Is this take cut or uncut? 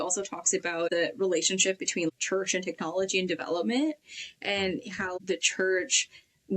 cut